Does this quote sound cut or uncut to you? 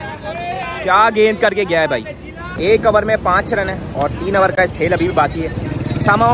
uncut